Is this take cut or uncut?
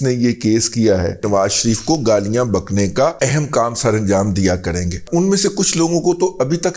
cut